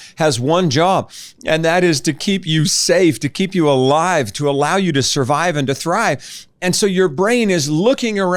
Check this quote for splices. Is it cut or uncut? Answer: uncut